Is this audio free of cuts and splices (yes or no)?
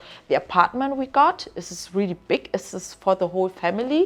yes